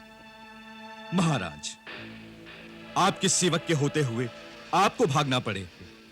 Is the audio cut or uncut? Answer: uncut